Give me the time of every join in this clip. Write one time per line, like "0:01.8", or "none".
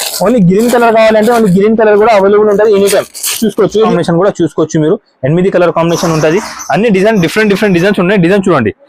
0:03.9